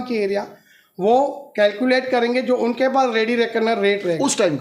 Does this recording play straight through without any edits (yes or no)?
yes